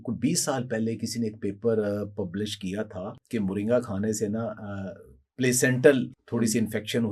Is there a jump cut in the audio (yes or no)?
yes